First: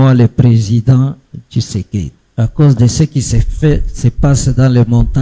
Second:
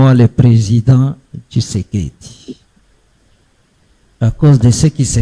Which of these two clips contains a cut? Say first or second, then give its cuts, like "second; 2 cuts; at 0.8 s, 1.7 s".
first; 1 cut; at 2.2 s